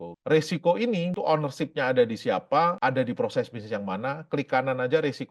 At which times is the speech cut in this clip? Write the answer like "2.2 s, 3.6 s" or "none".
1.1 s, 2.8 s